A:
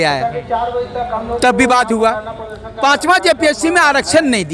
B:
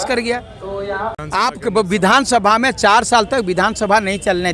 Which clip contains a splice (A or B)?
B